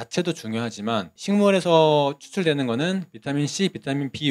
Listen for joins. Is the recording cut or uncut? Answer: cut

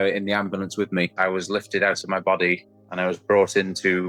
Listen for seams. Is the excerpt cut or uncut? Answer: cut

